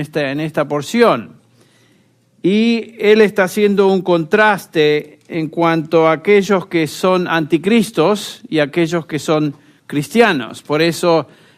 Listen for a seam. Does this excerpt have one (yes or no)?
yes